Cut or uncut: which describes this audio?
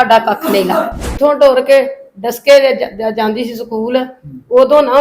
cut